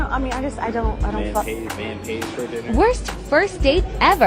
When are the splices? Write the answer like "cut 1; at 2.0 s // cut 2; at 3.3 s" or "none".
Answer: cut 1; at 2.6 s